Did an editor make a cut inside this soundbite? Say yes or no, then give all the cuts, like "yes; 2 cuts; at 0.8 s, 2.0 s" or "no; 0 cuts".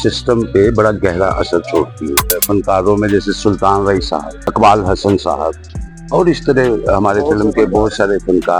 yes; 2 cuts; at 2.4 s, 4.5 s